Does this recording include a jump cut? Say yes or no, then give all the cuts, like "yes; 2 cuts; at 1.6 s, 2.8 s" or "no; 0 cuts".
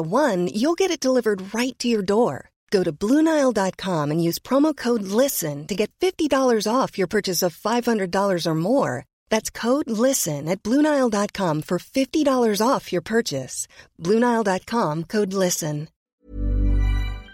yes; 1 cut; at 16.1 s